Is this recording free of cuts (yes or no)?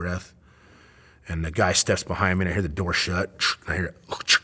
yes